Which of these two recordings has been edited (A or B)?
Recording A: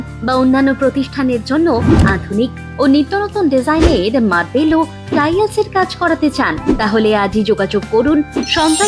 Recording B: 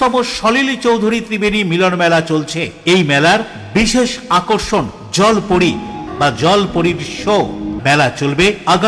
B